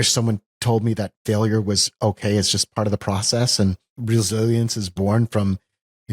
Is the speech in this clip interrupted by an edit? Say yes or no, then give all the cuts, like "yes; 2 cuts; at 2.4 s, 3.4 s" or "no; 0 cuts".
yes; 1 cut; at 3.9 s